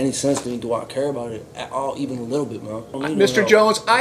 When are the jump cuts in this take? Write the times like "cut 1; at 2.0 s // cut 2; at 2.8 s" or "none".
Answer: cut 1; at 2.9 s